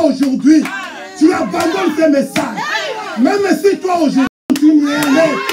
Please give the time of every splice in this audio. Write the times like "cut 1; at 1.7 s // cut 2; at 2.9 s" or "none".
cut 1; at 4.3 s